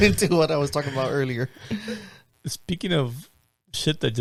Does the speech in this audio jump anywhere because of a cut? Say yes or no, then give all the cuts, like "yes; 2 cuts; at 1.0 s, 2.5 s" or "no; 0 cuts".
no; 0 cuts